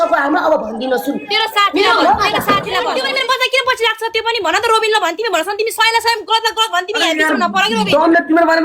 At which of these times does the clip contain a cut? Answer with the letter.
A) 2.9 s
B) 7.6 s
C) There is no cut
A